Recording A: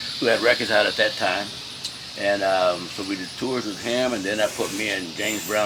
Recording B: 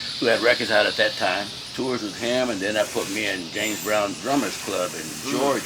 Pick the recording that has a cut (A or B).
B